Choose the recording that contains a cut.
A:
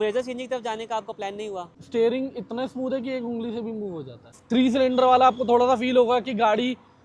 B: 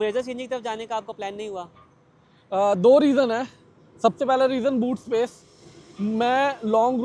A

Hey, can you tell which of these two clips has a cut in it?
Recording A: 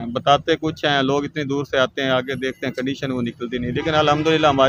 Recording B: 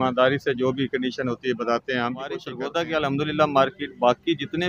B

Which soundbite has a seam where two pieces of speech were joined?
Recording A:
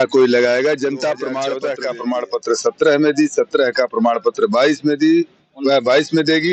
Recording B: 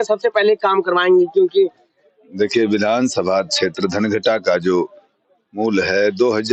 A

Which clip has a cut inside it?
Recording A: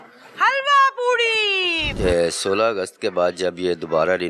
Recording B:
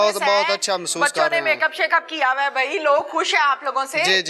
A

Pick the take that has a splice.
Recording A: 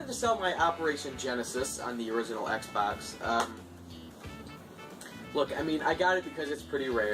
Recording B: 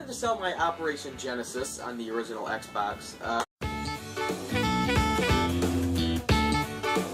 A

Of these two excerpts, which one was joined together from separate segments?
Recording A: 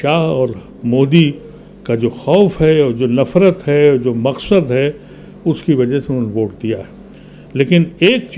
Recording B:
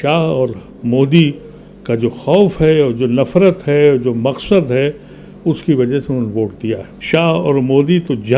B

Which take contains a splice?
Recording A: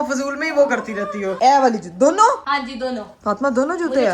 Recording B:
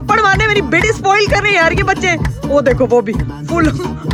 A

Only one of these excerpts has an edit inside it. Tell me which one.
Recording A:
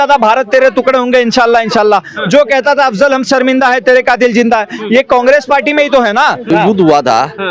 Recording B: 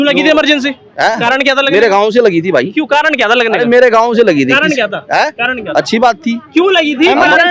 A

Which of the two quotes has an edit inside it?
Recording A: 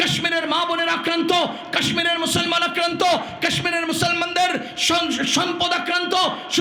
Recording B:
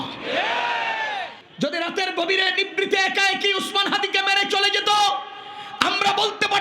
B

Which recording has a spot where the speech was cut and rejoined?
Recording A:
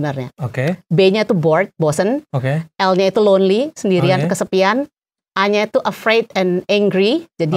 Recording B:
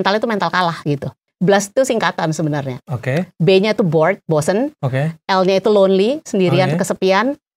B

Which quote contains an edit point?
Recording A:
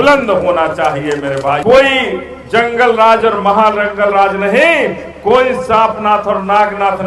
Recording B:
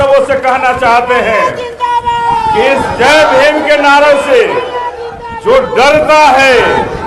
A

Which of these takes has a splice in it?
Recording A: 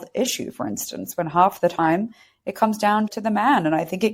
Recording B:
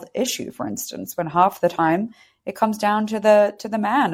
A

